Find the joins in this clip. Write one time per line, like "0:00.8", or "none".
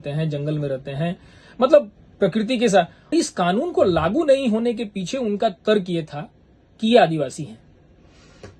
0:03.1

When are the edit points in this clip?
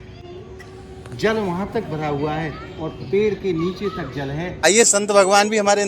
0:04.6

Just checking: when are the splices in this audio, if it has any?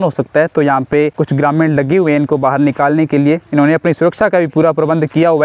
none

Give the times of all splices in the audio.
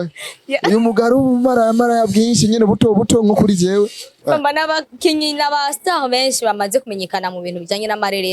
0:04.1

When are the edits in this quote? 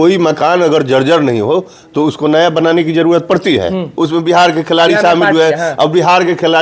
0:03.9

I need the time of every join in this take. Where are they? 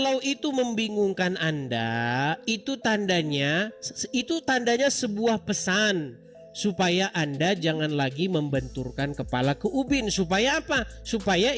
none

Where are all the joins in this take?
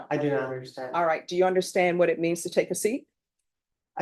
none

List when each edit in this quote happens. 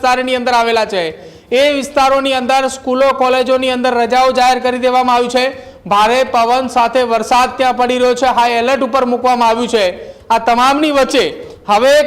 none

